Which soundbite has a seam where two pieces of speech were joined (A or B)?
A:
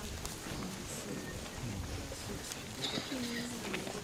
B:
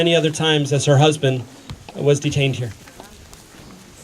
B